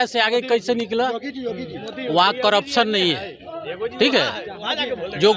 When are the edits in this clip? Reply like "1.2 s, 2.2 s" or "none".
none